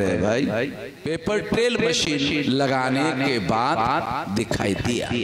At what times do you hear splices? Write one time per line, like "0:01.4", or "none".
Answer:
0:00.9